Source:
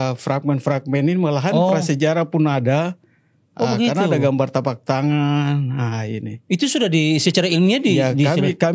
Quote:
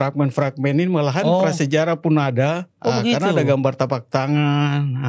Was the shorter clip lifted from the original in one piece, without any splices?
no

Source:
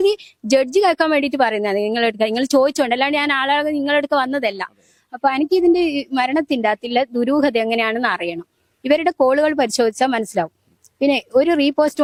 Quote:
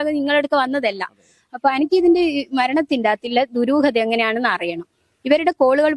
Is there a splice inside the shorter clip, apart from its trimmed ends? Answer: no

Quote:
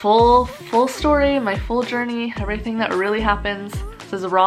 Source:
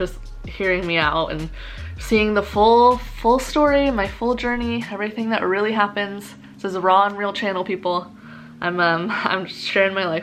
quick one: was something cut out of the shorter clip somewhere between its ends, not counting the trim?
no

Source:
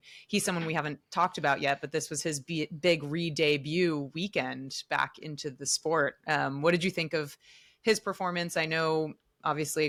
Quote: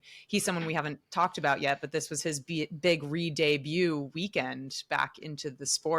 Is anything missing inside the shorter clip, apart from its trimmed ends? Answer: no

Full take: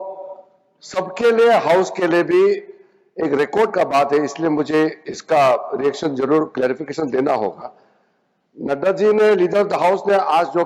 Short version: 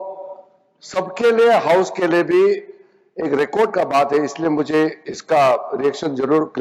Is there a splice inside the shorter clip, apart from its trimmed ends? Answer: no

